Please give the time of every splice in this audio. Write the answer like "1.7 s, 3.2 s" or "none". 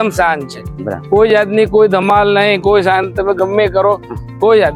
none